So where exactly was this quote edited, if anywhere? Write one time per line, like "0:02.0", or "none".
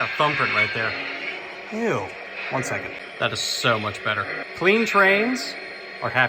0:03.0
0:04.4